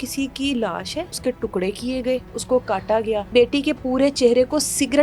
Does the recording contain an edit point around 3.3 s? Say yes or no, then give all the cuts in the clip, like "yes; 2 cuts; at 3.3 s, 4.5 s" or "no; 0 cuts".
yes; 3 cuts; at 1.2 s, 2.3 s, 3.3 s